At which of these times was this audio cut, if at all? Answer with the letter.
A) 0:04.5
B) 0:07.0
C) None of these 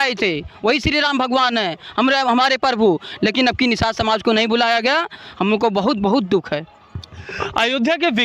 C